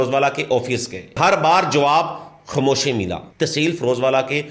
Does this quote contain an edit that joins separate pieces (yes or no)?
yes